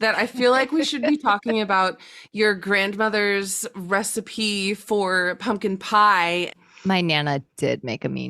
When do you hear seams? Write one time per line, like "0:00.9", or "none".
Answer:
0:06.5